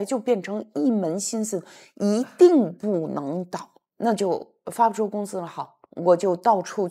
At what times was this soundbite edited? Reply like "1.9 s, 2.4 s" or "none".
5.8 s